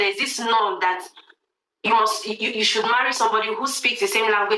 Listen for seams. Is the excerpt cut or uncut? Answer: uncut